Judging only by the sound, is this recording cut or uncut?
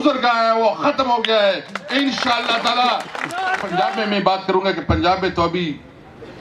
cut